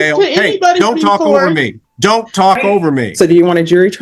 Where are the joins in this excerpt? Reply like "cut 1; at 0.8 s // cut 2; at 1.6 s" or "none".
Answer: cut 1; at 3.1 s

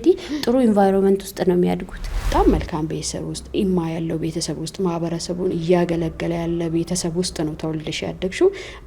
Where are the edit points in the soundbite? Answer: cut 1; at 2.2 s

